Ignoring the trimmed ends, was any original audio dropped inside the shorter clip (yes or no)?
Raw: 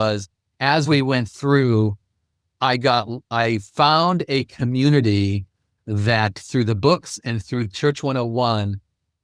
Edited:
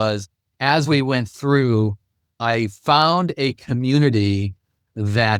yes